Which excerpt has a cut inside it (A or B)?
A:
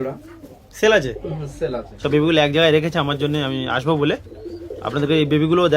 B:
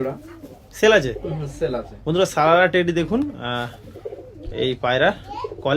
A